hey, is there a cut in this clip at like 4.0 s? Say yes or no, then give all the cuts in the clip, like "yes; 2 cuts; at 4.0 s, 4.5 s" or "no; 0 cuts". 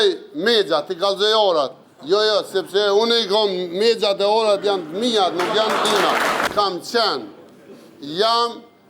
no; 1 cut; at 6.5 s